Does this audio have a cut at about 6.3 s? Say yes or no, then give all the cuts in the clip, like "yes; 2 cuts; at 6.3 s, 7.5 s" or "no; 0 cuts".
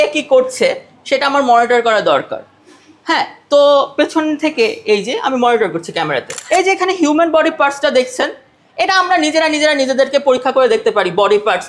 yes; 1 cut; at 6.3 s